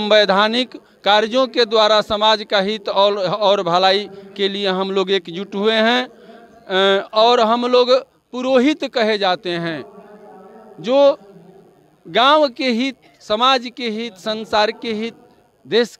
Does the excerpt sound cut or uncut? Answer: uncut